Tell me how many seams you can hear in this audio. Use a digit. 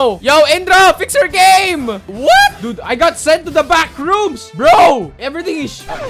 1